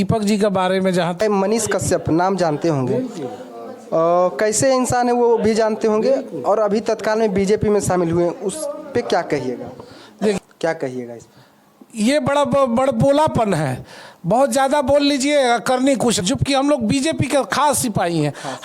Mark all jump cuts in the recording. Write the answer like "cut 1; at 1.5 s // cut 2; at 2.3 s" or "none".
cut 1; at 1.2 s // cut 2; at 10.4 s // cut 3; at 16.2 s